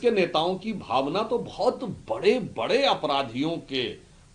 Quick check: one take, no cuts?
yes; 0 cuts

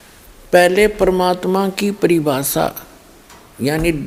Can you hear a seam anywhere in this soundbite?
no; 0 cuts

